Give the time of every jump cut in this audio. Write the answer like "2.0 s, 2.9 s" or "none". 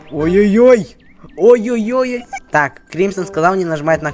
2.3 s